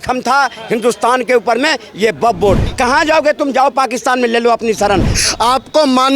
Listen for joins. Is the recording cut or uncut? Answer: cut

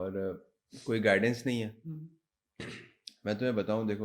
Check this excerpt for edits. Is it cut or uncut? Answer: uncut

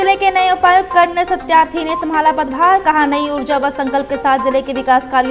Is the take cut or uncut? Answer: uncut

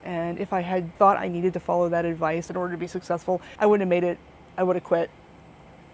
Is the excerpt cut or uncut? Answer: cut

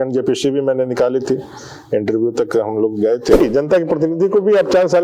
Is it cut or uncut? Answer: cut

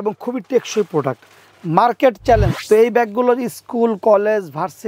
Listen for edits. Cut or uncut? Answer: cut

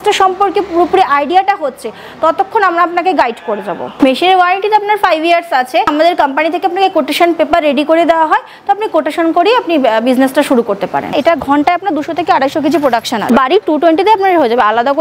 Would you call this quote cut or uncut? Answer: cut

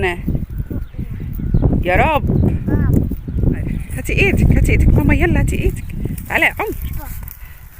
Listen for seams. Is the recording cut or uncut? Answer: cut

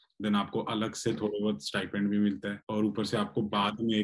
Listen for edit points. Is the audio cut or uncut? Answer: cut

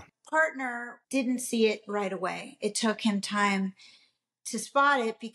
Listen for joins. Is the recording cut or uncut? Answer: cut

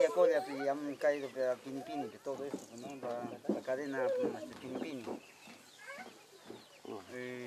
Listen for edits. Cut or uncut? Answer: uncut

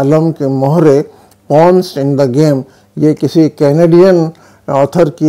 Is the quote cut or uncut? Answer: uncut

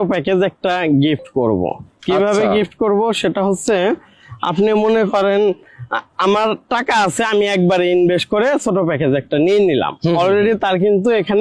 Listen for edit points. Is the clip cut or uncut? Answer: uncut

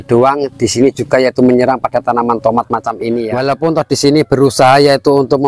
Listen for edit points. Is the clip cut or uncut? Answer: cut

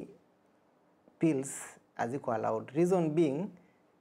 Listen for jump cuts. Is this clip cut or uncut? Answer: uncut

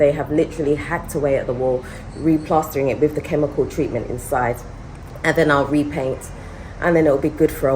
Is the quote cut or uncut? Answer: uncut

